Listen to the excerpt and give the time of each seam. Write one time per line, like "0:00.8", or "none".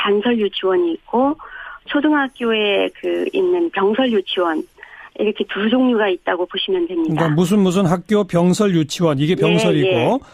0:02.4